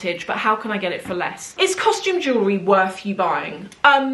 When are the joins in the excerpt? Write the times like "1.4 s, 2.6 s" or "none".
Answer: 1.5 s